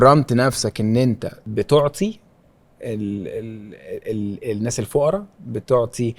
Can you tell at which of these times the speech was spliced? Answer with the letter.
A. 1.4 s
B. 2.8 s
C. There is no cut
A